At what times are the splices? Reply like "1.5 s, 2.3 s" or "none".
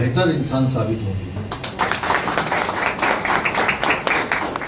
1.4 s